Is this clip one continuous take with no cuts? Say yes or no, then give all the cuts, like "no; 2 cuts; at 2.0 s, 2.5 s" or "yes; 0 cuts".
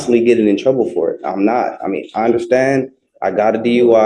yes; 0 cuts